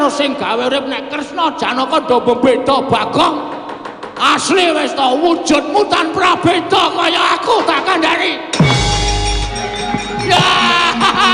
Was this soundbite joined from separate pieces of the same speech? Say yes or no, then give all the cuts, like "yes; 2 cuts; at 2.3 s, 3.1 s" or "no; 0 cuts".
yes; 1 cut; at 9.5 s